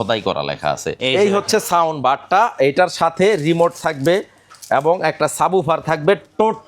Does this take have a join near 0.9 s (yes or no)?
yes